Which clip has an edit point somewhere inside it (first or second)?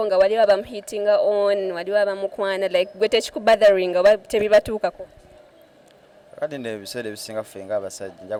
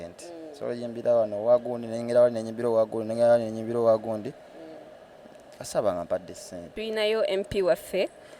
second